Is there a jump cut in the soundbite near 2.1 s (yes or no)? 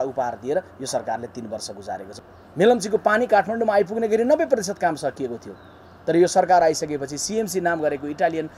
yes